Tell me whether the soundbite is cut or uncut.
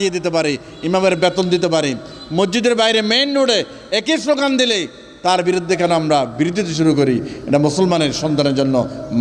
uncut